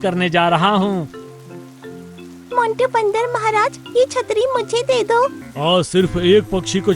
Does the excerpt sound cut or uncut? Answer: cut